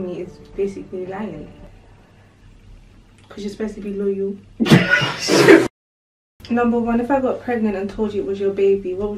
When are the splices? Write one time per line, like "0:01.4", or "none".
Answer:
0:03.2
0:05.6